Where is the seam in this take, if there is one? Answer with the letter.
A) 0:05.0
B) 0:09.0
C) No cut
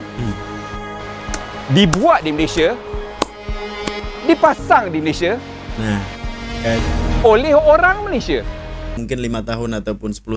B